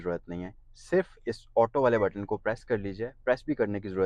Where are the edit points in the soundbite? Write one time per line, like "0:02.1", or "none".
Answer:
none